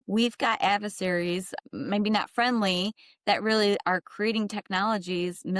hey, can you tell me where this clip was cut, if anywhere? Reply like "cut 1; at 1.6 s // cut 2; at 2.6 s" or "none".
cut 1; at 1.5 s